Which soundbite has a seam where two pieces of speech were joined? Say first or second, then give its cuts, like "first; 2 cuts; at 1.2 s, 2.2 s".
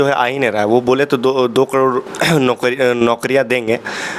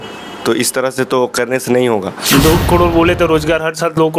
second; 1 cut; at 2.2 s